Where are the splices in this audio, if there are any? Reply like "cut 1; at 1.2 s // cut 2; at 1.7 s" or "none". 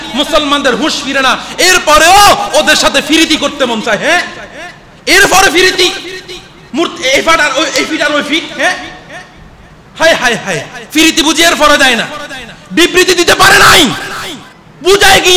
none